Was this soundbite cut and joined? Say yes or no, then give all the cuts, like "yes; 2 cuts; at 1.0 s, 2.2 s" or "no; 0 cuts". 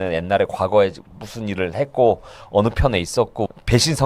no; 0 cuts